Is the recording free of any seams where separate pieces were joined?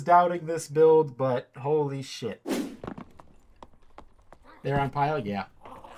yes; 0 cuts

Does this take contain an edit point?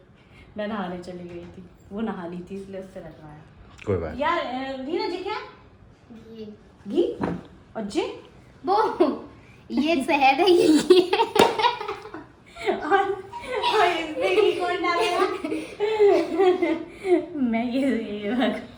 no; 0 cuts

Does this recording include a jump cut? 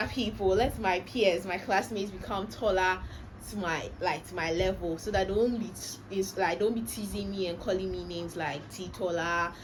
no; 0 cuts

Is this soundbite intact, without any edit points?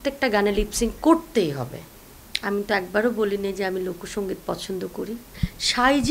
yes; 0 cuts

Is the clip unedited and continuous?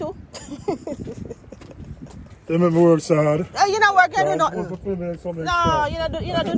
yes; 0 cuts

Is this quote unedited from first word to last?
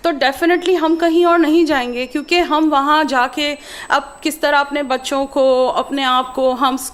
yes; 0 cuts

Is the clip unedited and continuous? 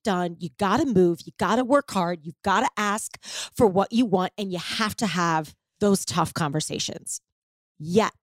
no; 1 cut; at 5.6 s

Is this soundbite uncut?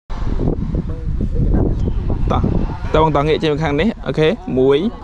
yes; 0 cuts

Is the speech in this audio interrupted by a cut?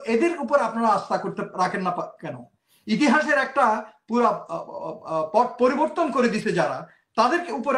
no; 0 cuts

